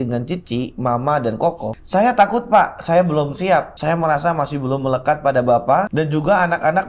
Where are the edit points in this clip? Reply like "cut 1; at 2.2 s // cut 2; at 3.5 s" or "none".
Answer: cut 1; at 1.8 s // cut 2; at 3.7 s // cut 3; at 5.9 s